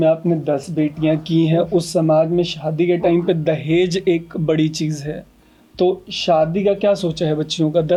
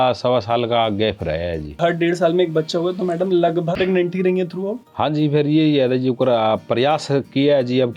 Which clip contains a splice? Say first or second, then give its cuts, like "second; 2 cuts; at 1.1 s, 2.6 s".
second; 2 cuts; at 1.6 s, 3.8 s